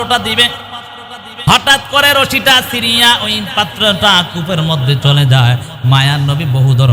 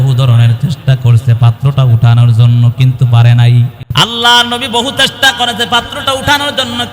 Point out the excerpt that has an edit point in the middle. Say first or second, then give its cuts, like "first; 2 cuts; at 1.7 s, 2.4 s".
second; 1 cut; at 3.8 s